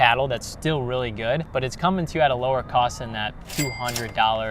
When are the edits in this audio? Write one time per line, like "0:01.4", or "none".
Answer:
0:01.5

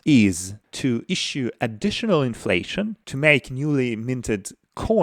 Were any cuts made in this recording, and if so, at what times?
0:00.9
0:03.0

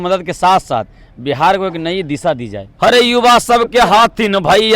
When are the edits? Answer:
0:02.7

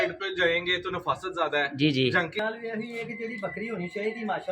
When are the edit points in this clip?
0:02.4

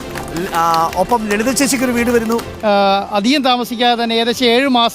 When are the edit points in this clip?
0:02.5

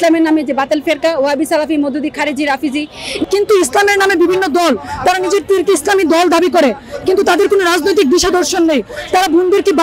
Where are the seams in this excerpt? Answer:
0:03.2

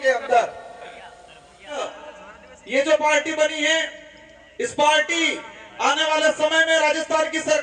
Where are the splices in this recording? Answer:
0:01.8

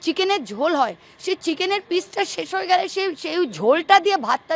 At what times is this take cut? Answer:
none

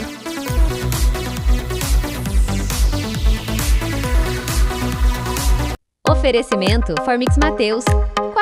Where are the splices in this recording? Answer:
0:05.9

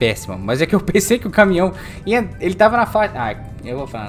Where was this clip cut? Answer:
none

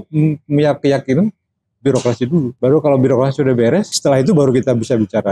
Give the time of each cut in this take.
0:02.5
0:03.9

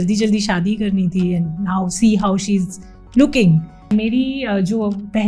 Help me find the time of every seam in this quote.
0:03.9

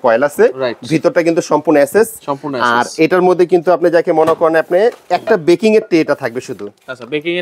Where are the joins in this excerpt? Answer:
none

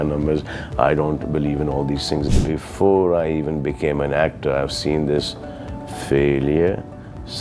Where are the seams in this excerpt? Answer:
0:02.3

